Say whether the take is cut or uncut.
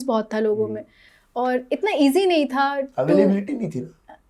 uncut